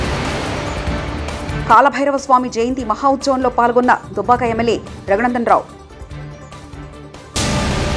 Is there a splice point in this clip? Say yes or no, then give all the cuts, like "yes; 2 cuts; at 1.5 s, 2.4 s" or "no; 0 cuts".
no; 0 cuts